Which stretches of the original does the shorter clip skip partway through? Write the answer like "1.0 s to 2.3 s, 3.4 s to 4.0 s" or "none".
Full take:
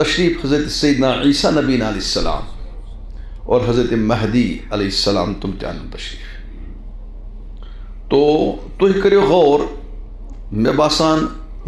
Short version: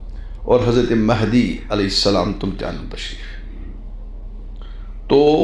none